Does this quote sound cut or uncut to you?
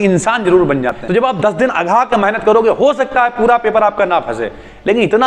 cut